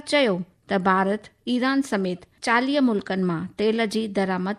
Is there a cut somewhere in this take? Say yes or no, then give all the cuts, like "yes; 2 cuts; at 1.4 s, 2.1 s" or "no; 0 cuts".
yes; 1 cut; at 2.3 s